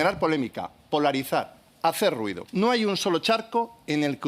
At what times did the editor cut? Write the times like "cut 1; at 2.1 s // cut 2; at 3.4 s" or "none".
cut 1; at 2.4 s